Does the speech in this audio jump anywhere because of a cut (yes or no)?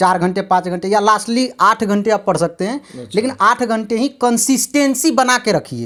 no